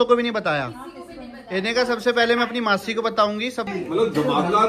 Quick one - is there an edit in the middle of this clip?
yes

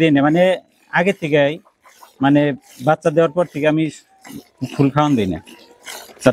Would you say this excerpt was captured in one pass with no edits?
yes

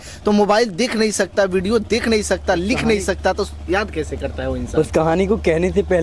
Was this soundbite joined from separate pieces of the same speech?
no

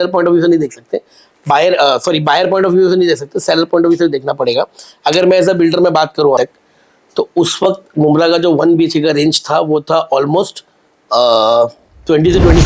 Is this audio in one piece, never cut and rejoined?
no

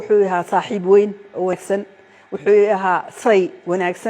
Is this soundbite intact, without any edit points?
no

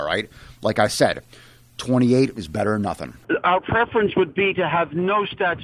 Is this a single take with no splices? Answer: no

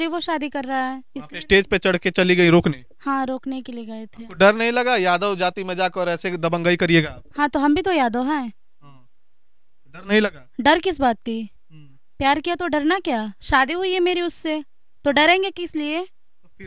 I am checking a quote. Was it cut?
no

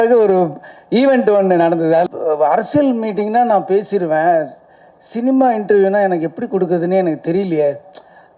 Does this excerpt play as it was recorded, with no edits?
no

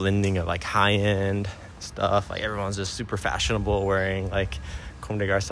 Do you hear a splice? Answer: no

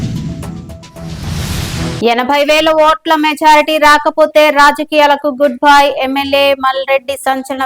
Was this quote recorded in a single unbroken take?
no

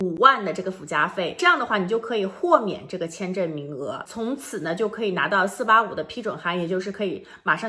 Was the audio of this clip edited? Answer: yes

